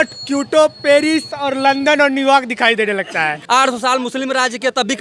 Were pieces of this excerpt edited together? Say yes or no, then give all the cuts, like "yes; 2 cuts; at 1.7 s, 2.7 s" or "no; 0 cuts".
yes; 1 cut; at 3.4 s